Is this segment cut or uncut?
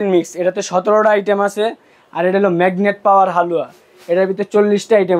uncut